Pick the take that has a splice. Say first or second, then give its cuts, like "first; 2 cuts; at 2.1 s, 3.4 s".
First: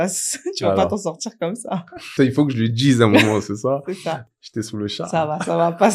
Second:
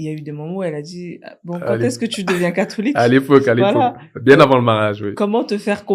first; 2 cuts; at 2.1 s, 4.2 s